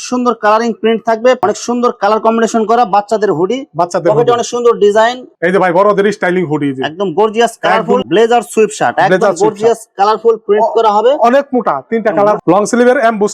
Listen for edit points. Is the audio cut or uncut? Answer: cut